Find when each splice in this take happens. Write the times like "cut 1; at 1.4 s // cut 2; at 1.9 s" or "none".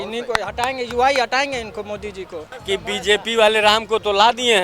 cut 1; at 2.5 s

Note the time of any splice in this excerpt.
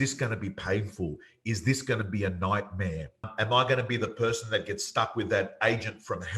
cut 1; at 3.3 s

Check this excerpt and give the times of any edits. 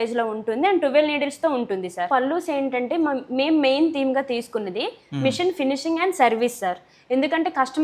cut 1; at 2.1 s

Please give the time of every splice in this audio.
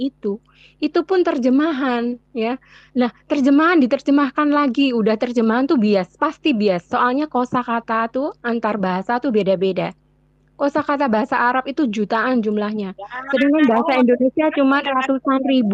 none

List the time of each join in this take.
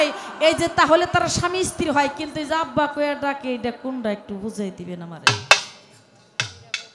none

